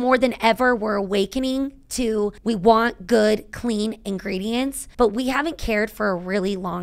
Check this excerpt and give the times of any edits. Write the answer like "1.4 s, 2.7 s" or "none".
2.4 s, 4.8 s